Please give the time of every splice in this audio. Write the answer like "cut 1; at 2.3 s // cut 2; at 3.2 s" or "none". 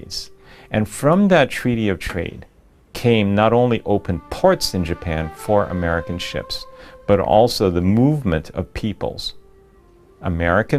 cut 1; at 6.2 s